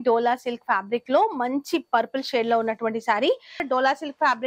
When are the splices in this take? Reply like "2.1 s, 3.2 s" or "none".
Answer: 3.6 s